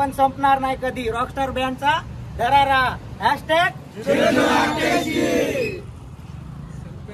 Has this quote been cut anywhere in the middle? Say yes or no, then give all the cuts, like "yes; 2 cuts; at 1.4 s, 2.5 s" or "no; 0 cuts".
no; 0 cuts